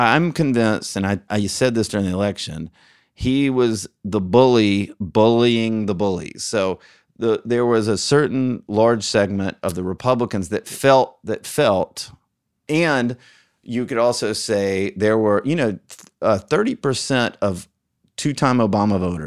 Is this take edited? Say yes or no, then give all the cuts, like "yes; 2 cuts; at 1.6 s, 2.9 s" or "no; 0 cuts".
yes; 2 cuts; at 1.2 s, 12.6 s